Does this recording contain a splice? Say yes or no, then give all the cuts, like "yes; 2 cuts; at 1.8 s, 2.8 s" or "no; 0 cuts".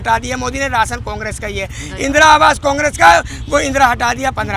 no; 0 cuts